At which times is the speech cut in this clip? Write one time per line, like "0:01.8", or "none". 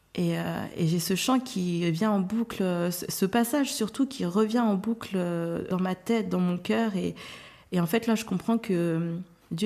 0:05.7